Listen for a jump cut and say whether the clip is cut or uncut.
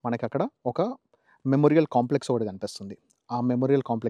uncut